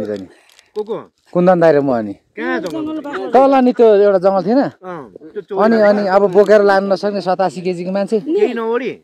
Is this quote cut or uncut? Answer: uncut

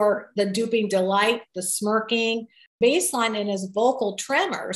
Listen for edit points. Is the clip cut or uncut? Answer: cut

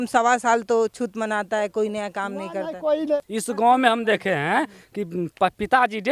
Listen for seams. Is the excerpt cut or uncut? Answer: cut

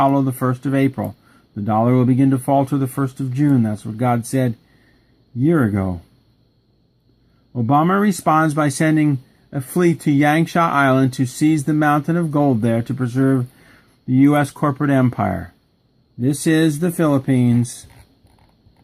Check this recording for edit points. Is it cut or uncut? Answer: cut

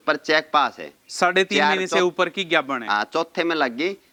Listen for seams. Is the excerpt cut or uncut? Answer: uncut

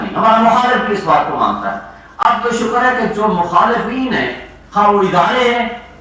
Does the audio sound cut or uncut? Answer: uncut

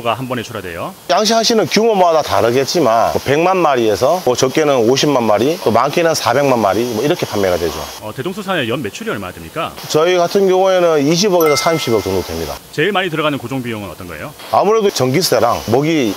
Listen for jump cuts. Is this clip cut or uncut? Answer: uncut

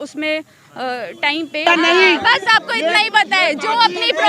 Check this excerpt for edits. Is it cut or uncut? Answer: cut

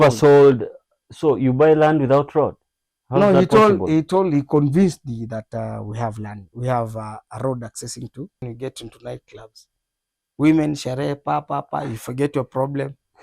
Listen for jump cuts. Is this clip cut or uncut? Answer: cut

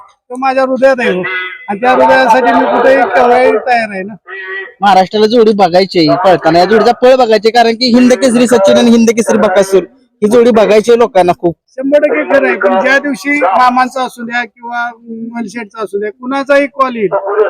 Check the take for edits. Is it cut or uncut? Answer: uncut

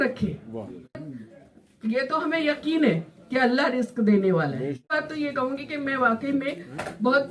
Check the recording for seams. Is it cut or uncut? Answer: cut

